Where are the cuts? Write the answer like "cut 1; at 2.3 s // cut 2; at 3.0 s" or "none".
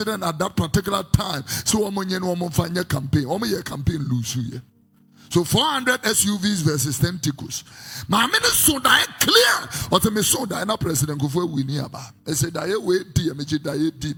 none